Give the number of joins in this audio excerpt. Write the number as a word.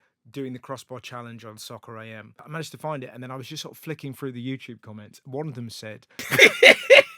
two